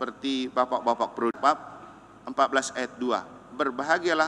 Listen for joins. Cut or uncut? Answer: cut